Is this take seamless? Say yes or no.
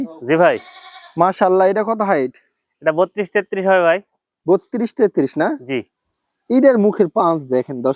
yes